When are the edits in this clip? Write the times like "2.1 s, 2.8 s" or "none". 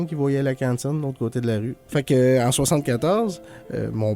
1.8 s

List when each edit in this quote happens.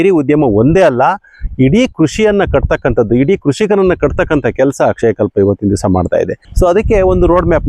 6.4 s

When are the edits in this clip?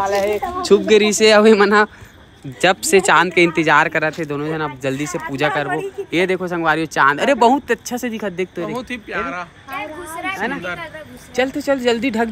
none

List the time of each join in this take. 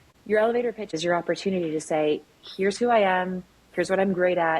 0.9 s

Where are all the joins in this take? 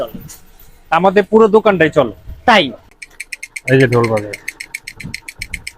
2.8 s

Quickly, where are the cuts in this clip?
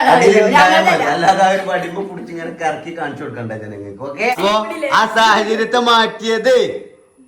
4.3 s

